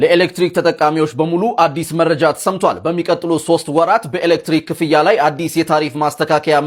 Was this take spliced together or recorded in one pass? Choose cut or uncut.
uncut